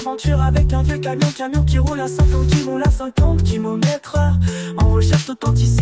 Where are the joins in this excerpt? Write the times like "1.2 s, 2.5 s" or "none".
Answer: none